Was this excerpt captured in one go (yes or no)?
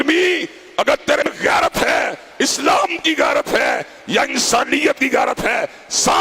no